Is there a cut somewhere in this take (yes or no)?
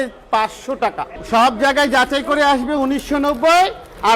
yes